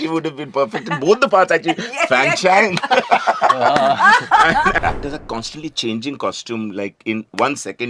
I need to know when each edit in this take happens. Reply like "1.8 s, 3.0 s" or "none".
4.8 s